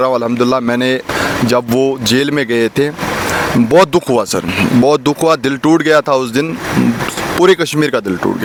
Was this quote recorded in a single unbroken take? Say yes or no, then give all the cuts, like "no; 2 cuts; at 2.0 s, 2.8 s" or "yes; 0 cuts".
yes; 0 cuts